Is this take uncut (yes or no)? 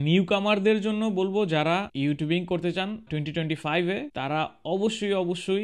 yes